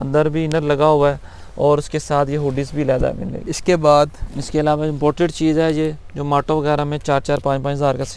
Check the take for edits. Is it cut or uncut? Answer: uncut